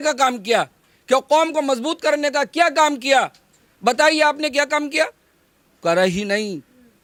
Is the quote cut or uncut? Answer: uncut